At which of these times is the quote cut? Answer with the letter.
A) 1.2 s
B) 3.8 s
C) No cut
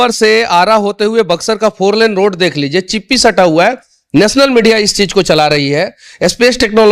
C